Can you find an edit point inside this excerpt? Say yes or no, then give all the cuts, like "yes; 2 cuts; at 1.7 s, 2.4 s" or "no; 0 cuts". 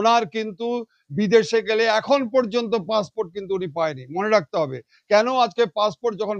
no; 0 cuts